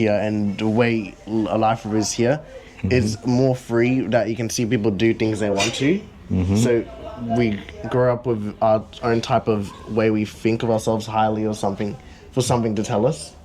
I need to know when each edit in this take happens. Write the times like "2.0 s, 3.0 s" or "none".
none